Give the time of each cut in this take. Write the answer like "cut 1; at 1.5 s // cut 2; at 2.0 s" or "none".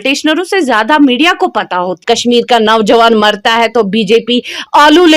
cut 1; at 1.9 s